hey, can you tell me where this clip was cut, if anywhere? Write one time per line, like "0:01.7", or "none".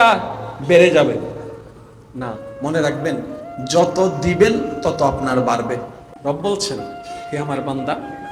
0:06.2